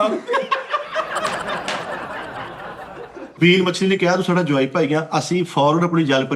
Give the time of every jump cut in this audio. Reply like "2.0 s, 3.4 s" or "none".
3.3 s